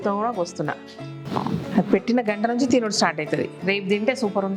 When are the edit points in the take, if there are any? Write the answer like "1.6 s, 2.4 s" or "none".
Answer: 1.3 s